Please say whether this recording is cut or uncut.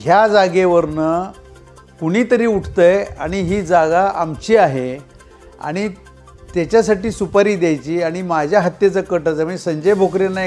uncut